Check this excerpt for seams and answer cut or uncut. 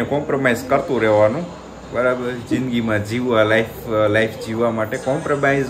uncut